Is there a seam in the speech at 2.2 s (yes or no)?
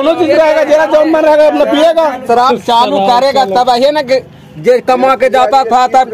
yes